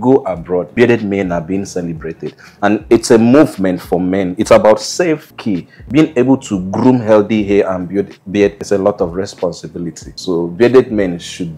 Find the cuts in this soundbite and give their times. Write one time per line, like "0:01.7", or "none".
0:05.3